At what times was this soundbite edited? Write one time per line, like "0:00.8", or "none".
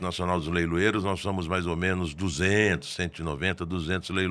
none